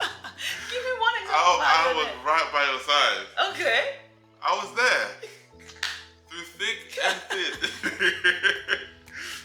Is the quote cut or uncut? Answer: uncut